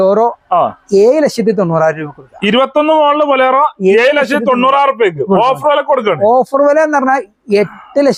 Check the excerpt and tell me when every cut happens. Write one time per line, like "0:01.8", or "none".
none